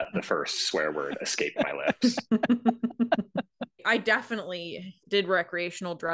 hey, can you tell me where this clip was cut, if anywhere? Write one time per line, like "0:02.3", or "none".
0:03.6
0:05.0